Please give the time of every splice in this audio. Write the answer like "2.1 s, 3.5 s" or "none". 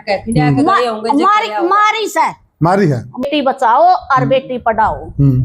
3.2 s